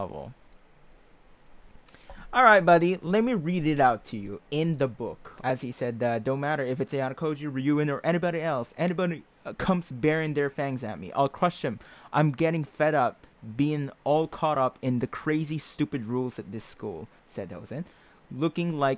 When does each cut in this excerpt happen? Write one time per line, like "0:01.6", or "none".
0:05.4